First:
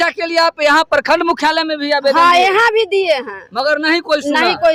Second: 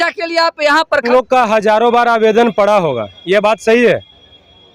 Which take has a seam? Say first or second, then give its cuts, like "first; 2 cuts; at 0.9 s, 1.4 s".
second; 1 cut; at 1.1 s